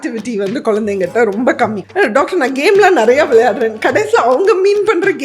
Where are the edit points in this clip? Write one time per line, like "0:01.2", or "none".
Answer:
0:01.8